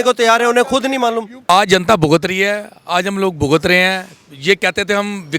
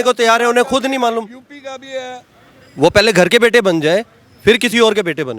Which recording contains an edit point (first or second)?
first